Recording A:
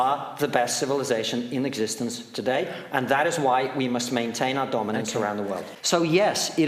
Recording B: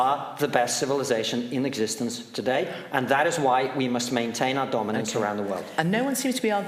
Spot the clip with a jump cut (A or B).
A